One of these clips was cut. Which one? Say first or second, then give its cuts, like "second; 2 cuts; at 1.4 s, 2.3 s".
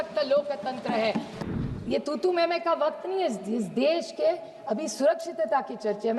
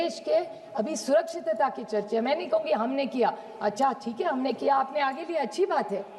first; 1 cut; at 1.3 s